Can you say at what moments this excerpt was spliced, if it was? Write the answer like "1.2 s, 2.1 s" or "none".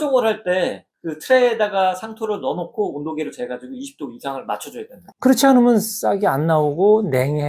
5.0 s

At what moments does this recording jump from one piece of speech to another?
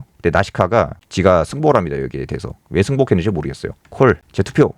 1.0 s, 3.8 s

